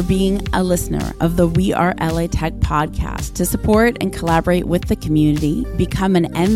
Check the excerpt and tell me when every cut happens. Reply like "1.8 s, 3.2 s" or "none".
none